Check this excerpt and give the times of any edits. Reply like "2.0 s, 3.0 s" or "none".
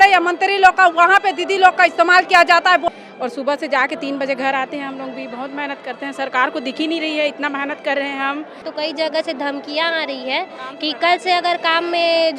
2.8 s, 8.7 s